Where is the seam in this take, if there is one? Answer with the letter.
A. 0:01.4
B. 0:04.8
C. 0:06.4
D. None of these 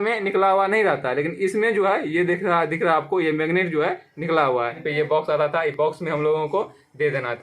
B